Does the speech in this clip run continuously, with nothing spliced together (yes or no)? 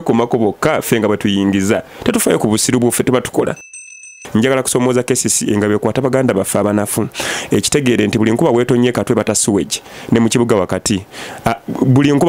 no